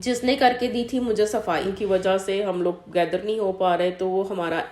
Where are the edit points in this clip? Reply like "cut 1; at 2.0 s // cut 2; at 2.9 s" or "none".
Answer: cut 1; at 1.7 s